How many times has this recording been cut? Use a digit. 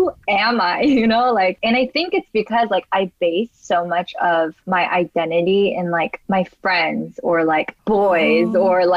4